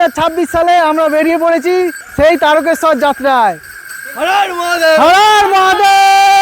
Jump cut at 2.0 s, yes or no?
yes